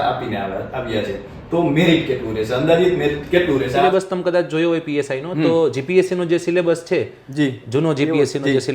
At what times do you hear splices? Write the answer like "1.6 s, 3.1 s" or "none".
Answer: 3.8 s